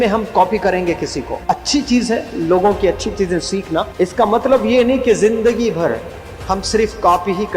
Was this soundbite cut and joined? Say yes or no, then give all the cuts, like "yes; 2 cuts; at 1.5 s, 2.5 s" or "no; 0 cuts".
yes; 2 cuts; at 1.3 s, 3.9 s